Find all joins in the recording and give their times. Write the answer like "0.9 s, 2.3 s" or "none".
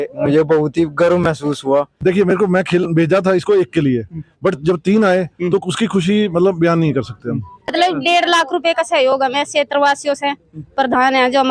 2.0 s, 7.6 s